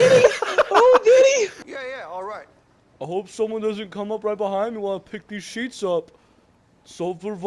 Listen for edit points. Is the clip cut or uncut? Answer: cut